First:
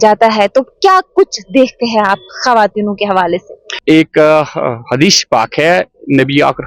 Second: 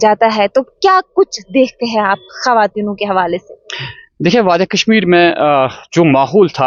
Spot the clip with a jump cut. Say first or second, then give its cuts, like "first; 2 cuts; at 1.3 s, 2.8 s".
first; 1 cut; at 3.7 s